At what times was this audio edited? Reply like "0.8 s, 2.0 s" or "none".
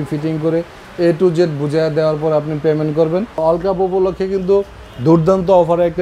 3.4 s